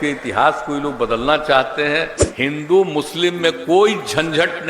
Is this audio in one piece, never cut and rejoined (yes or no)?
no